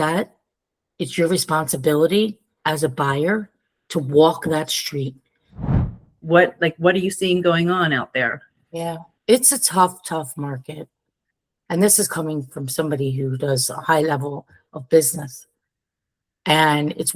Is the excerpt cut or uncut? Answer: cut